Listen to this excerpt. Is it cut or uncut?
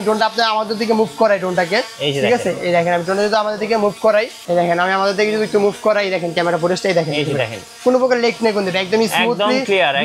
uncut